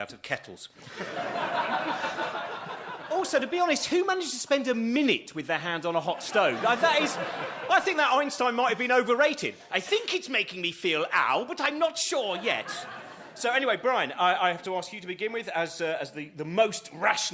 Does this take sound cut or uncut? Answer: uncut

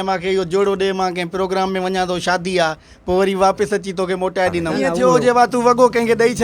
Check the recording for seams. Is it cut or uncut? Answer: cut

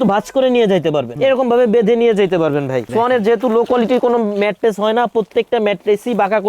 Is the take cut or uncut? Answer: cut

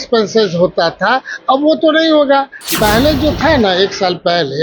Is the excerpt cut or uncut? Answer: cut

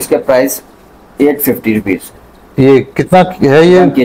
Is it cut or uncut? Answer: uncut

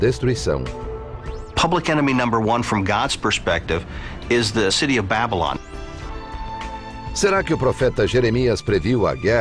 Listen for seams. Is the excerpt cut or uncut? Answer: uncut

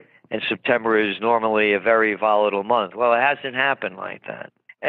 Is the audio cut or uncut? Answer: cut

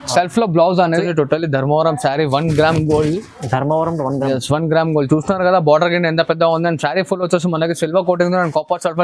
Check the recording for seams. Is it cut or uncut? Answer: cut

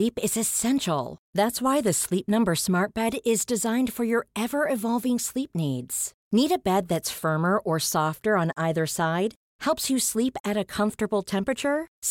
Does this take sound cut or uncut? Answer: uncut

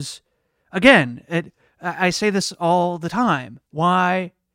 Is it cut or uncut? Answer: cut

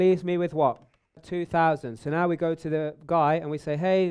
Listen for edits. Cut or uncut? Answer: cut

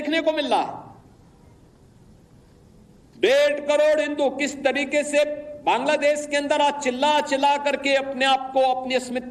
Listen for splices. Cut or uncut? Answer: uncut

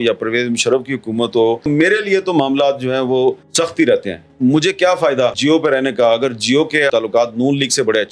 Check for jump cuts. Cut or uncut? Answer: cut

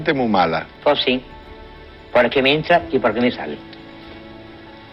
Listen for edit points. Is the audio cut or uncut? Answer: uncut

